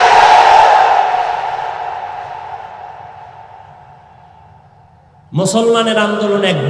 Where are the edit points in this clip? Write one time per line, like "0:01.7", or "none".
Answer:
none